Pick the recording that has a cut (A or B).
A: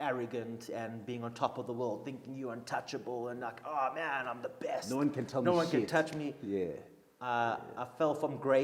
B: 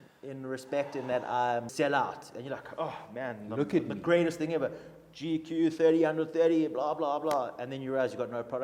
B